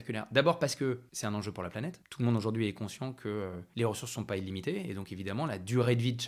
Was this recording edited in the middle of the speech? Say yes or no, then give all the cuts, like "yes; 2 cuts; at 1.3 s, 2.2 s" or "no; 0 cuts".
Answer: yes; 3 cuts; at 1.1 s, 2.0 s, 3.6 s